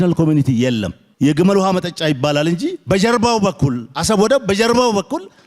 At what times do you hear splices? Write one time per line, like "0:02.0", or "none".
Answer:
0:01.0